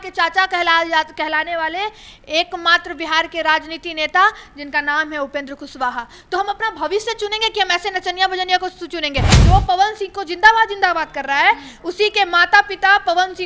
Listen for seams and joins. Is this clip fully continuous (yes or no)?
no